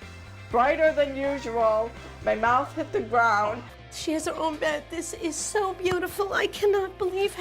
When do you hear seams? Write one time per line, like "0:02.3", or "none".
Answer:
0:03.7